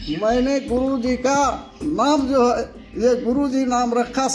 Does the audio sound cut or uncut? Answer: uncut